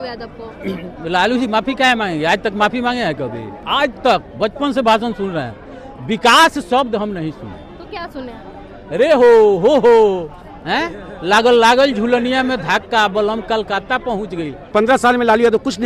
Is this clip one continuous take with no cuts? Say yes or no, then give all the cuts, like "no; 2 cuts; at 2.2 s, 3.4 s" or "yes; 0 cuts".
no; 2 cuts; at 3.6 s, 14.6 s